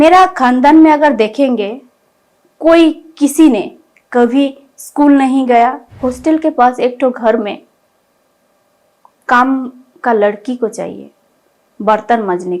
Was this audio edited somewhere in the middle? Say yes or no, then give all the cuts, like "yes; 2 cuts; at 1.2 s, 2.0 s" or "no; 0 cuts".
yes; 1 cut; at 5.9 s